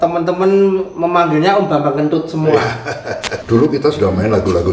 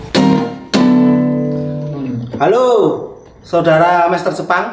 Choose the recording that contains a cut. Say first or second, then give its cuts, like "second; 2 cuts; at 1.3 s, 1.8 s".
first; 1 cut; at 3.3 s